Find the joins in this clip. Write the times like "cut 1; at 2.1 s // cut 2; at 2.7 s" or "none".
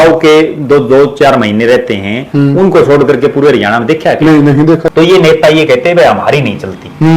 cut 1; at 4.9 s